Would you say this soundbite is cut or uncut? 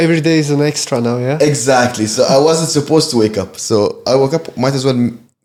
uncut